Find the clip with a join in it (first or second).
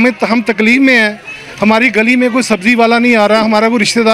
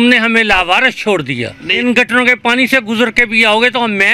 second